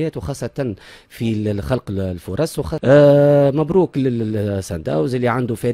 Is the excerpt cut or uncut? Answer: cut